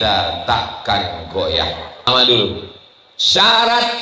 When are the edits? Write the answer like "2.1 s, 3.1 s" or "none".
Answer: 2.1 s